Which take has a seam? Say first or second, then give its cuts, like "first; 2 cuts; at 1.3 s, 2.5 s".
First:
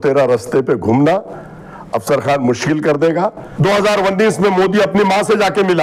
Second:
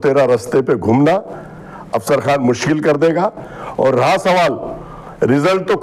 first; 1 cut; at 3.4 s